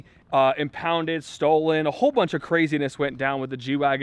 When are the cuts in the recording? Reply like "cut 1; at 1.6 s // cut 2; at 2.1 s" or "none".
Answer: none